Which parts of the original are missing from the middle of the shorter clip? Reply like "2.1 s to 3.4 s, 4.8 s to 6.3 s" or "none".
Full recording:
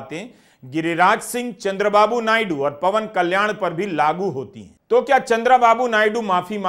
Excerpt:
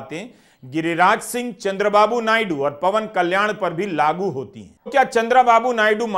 4.9 s to 5.0 s